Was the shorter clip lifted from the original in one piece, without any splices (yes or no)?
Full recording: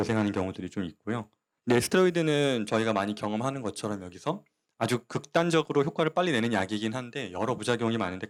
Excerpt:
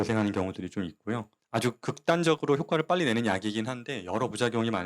no